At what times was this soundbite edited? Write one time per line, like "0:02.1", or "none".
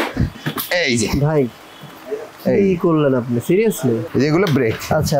0:04.0